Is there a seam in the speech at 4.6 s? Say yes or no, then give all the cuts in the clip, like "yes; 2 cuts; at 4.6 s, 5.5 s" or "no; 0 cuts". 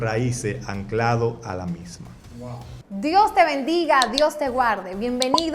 no; 1 cut; at 2.7 s